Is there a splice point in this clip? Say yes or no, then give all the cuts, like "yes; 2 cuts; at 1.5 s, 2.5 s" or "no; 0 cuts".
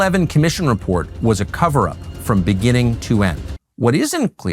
yes; 1 cut; at 3.5 s